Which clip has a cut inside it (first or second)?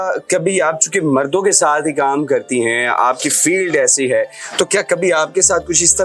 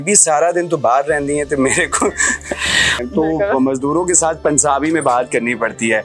second